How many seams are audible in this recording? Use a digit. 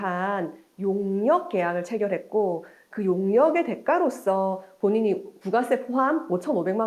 0